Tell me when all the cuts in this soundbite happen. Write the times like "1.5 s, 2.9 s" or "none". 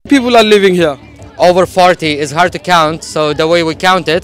none